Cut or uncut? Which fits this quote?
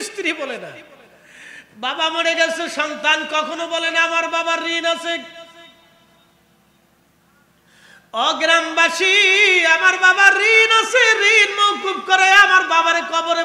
uncut